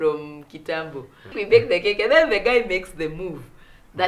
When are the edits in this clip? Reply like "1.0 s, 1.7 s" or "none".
1.4 s